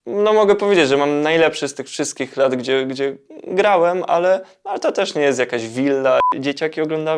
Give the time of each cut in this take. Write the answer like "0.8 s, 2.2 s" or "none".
6.3 s